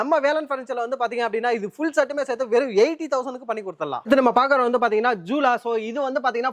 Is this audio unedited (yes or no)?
no